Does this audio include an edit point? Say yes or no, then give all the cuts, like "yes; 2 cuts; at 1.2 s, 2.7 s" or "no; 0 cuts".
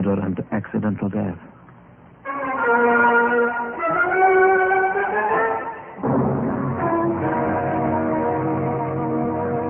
no; 0 cuts